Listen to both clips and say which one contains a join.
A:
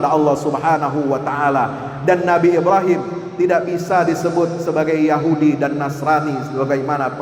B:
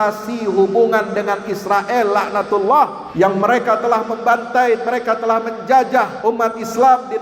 B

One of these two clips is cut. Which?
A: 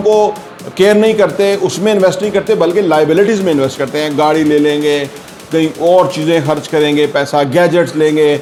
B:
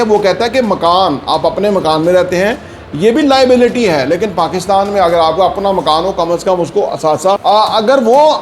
B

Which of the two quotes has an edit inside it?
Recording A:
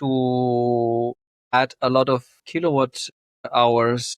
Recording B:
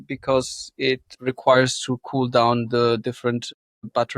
A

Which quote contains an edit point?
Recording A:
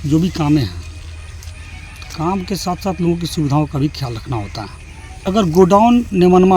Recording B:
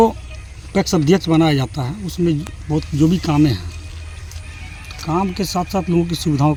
A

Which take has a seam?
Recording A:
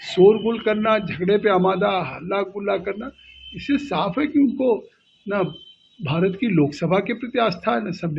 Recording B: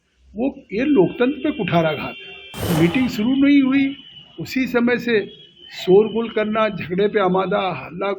B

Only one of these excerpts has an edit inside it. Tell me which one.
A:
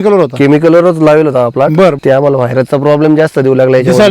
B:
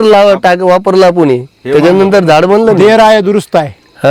A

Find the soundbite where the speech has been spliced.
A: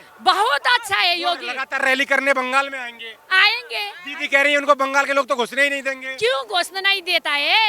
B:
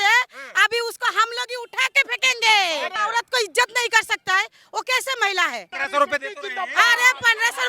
B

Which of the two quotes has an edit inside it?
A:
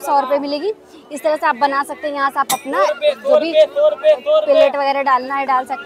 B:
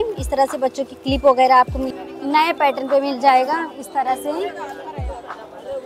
B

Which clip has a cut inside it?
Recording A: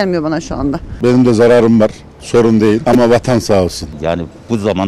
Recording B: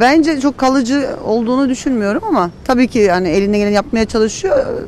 A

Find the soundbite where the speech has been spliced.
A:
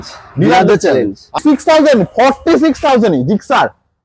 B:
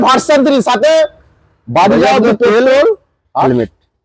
A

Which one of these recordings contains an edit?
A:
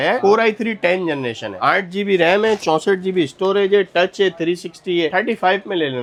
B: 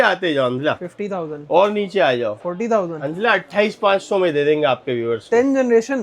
B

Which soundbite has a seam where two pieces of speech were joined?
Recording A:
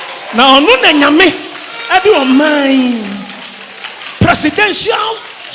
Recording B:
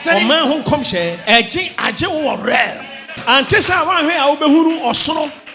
B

